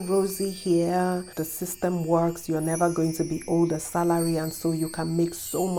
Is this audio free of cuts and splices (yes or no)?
yes